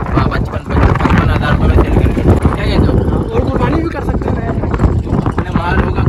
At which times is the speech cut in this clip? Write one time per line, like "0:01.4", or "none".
none

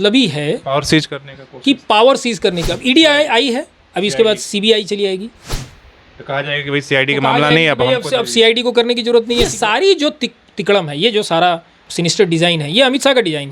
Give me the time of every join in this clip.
0:09.5
0:11.8

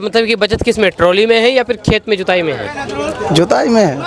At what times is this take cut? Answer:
none

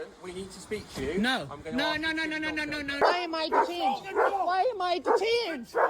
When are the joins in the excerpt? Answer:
0:02.9

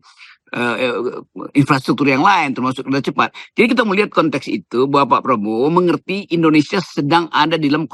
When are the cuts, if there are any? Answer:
none

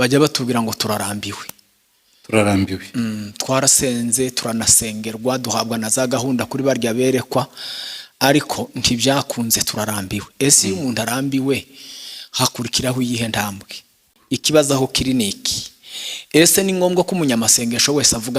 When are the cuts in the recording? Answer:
0:14.1

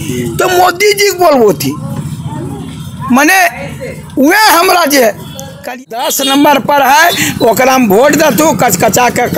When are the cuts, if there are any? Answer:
0:05.8

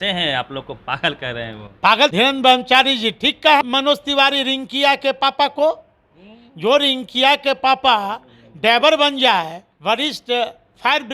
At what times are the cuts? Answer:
0:02.1
0:03.6
0:09.7

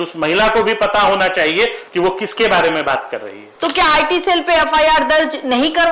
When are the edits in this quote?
0:03.5

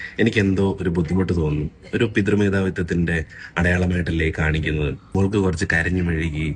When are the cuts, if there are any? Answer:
0:05.1

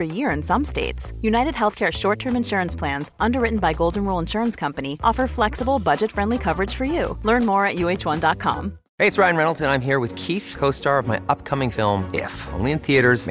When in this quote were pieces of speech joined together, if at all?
0:08.8

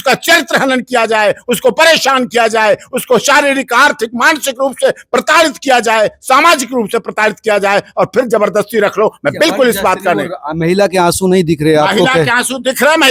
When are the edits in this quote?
none

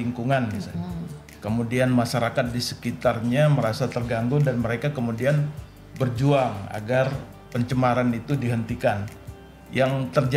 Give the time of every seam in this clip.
none

